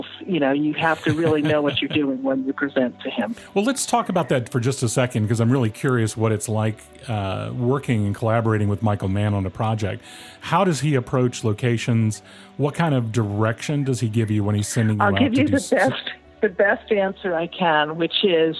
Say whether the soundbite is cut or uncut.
cut